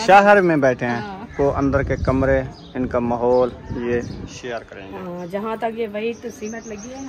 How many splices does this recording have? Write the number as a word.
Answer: one